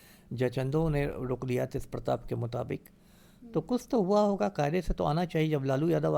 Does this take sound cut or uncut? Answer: uncut